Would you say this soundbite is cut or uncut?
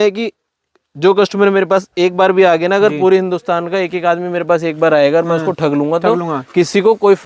uncut